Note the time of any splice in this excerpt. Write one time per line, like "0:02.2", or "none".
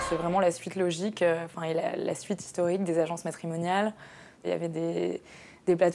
none

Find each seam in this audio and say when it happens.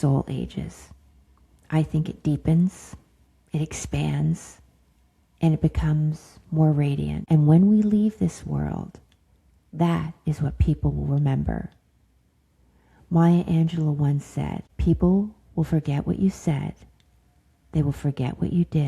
0:07.2
0:14.7

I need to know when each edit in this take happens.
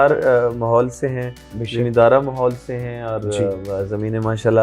none

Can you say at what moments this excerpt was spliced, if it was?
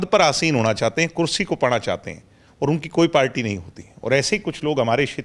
none

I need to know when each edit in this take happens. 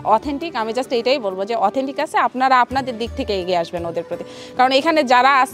none

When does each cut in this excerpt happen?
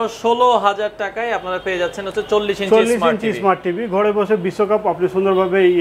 none

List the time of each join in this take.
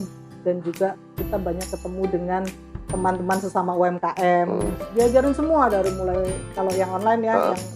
0:04.7

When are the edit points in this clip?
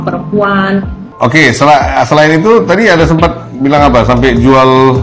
0:01.0

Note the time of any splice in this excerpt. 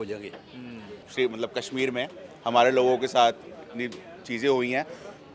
0:01.1

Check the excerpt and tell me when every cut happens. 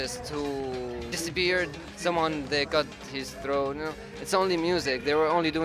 0:01.1
0:01.9

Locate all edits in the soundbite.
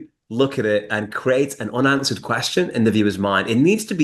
none

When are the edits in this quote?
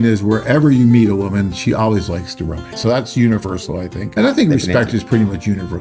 0:02.8
0:04.1

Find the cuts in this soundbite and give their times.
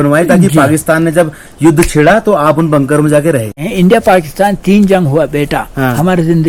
0:03.6

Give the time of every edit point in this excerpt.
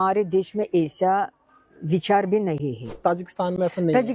0:03.0

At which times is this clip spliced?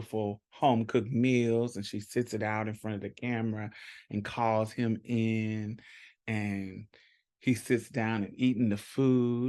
none

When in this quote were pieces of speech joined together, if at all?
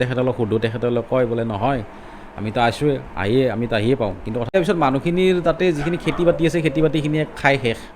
0:04.5

